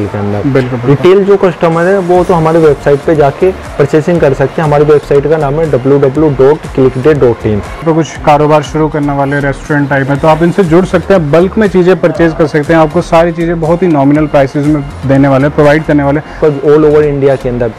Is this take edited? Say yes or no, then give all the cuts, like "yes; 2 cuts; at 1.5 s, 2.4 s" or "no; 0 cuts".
yes; 2 cuts; at 7.8 s, 16.4 s